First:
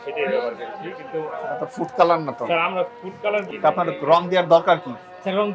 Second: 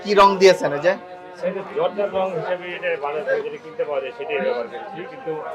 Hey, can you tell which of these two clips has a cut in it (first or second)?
first